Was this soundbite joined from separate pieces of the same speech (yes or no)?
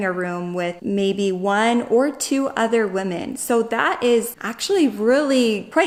no